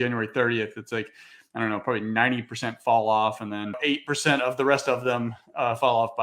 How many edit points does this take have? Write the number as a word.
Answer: one